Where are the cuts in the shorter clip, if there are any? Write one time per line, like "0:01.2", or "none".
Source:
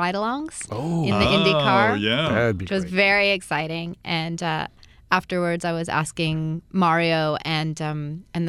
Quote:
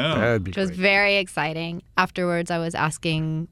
0:01.8

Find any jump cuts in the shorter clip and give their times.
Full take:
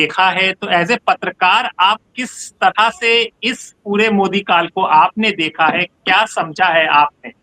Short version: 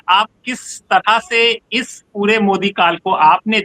none

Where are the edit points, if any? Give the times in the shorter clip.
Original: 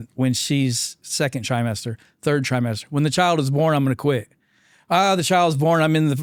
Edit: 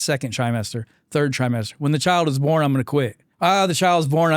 0:03.2

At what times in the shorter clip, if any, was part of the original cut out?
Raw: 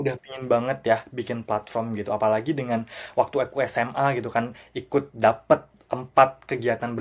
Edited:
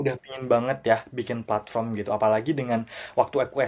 none

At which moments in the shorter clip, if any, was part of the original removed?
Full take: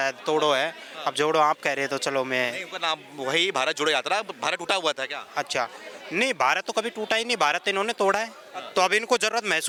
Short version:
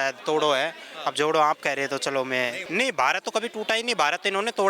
0:02.6

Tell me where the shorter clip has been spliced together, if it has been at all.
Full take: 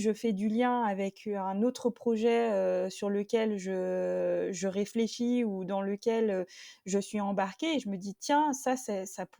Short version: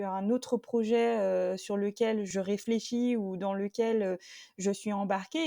0:02.3

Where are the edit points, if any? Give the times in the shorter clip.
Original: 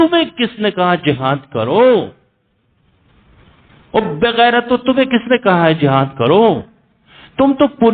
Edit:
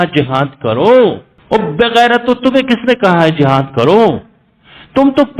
0:01.3

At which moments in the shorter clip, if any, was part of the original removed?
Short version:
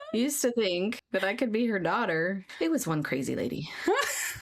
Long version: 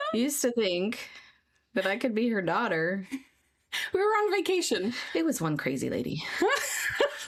0:01.0
0:02.5

